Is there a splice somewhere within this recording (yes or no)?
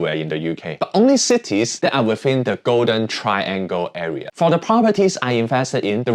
yes